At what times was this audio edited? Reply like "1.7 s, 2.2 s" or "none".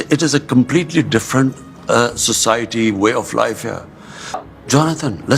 4.4 s

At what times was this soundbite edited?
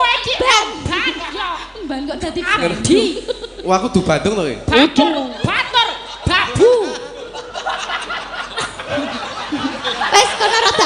8.8 s

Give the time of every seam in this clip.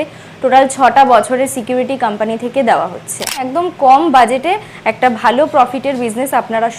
3.4 s

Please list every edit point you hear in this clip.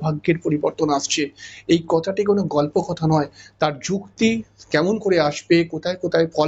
none

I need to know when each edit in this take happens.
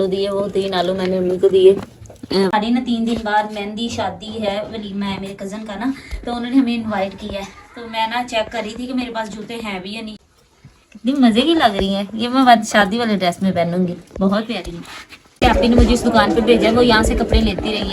2.5 s, 10.1 s, 15.4 s

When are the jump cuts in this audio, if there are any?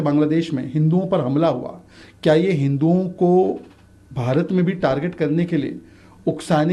none

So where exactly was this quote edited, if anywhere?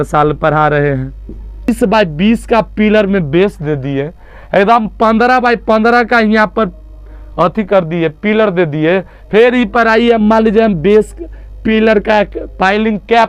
1.7 s

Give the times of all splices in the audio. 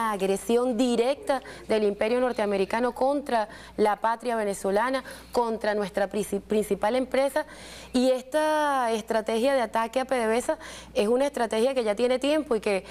4.3 s

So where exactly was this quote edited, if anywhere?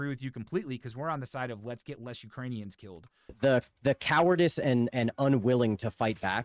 3.3 s

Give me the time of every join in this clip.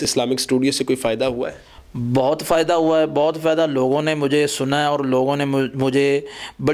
none

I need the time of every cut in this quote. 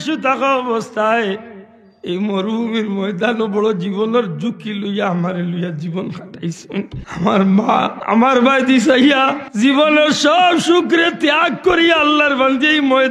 7.0 s, 8.0 s, 9.4 s

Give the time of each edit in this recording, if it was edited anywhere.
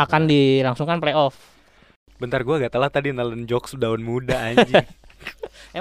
2.0 s

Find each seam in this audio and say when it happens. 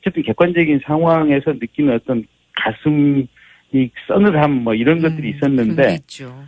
1.0 s

